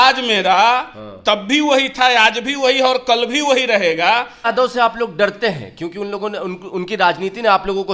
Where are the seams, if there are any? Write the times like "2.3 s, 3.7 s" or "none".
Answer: 4.5 s